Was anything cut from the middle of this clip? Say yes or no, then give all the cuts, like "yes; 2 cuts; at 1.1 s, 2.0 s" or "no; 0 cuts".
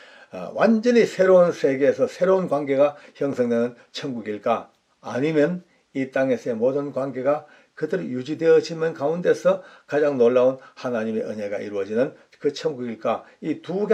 no; 0 cuts